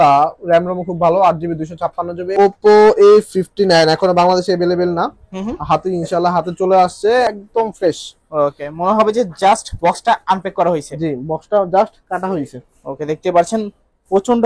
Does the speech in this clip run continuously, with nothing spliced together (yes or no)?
no